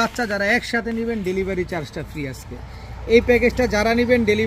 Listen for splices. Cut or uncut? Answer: uncut